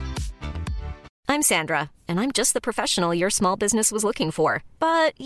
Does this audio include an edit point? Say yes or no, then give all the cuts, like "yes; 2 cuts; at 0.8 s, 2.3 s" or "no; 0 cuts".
yes; 1 cut; at 1.1 s